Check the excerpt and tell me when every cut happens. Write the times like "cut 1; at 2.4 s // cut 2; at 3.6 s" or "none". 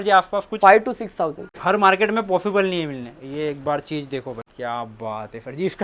cut 1; at 1.5 s // cut 2; at 4.5 s